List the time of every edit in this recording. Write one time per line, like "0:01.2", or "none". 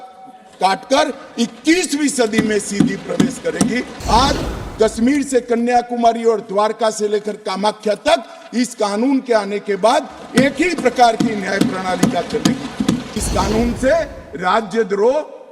0:03.9
0:13.1